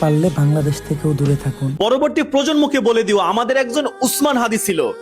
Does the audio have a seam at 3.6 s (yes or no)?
no